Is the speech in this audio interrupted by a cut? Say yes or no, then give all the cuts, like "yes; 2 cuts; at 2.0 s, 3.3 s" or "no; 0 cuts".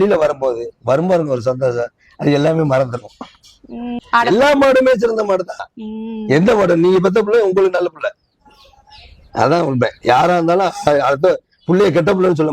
yes; 1 cut; at 4.0 s